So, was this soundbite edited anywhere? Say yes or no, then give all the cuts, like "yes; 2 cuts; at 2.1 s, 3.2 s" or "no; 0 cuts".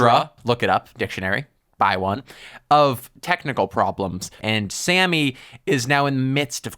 yes; 1 cut; at 4.4 s